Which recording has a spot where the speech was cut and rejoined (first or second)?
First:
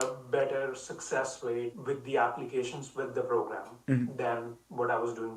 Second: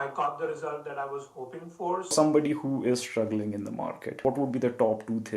second